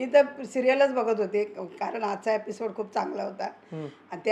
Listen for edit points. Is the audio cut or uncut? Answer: uncut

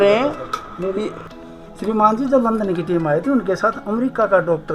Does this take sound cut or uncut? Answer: cut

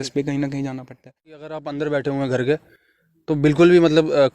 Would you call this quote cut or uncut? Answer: cut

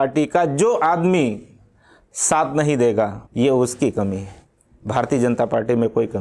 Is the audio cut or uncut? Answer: cut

